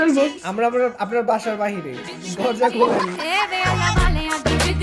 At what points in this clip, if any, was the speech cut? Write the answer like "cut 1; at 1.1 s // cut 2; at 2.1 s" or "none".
none